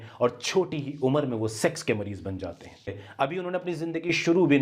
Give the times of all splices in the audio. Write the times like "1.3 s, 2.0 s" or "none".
3.0 s

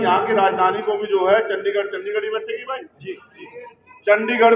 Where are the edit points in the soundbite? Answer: none

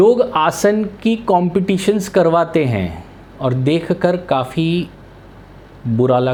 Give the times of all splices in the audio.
none

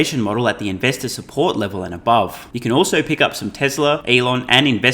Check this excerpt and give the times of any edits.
2.5 s, 4.0 s

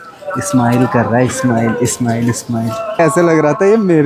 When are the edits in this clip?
3.0 s

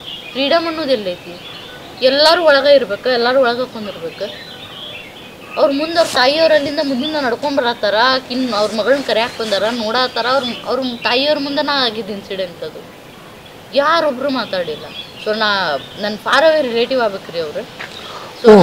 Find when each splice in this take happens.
none

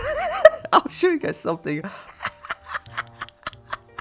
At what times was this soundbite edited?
2.0 s

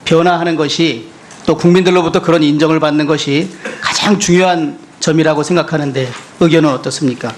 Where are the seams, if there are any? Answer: 1.9 s

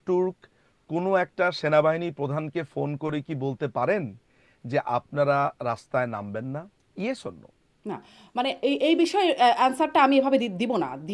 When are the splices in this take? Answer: 6.8 s

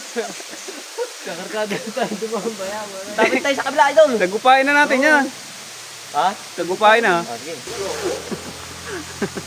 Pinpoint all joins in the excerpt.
7.7 s

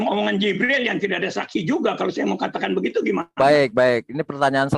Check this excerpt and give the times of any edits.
none

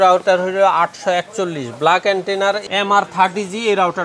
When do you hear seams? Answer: 2.6 s

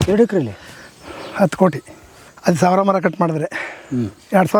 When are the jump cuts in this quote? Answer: none

